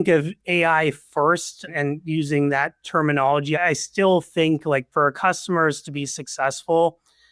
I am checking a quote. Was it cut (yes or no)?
yes